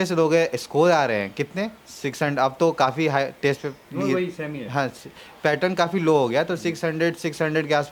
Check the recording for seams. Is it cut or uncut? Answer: uncut